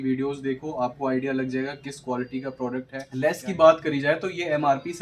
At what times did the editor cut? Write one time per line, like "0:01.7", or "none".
0:03.0

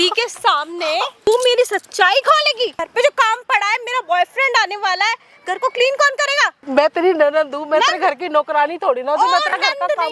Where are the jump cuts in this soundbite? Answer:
0:01.3
0:02.8
0:06.6

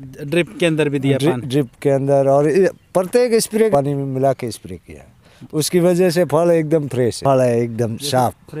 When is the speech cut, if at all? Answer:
0:03.7
0:07.2

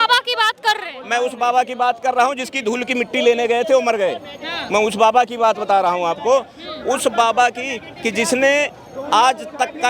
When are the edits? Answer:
none

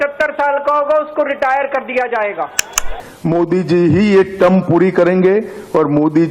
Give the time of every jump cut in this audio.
0:02.9

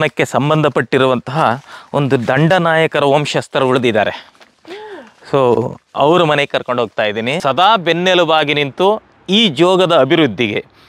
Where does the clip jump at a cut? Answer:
0:07.3

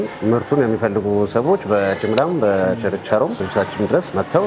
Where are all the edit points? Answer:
none

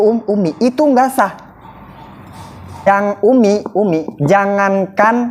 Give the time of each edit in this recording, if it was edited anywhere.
0:02.9

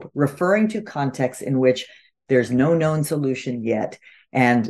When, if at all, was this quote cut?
none

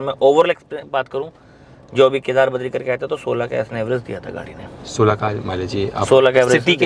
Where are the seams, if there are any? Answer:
none

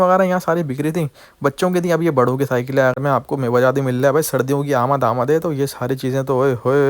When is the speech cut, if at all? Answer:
0:03.0

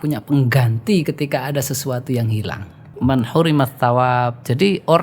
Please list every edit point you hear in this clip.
0:02.9

